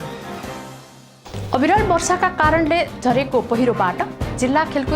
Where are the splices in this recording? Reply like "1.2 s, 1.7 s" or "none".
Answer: 1.0 s